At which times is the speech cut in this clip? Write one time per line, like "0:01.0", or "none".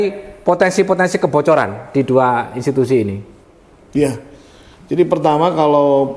none